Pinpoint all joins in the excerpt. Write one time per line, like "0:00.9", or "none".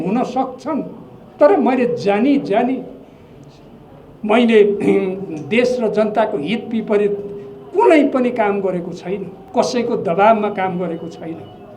0:09.4